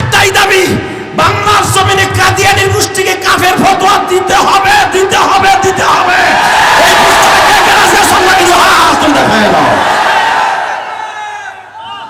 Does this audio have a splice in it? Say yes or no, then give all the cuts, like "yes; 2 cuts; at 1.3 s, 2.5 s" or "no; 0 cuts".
no; 0 cuts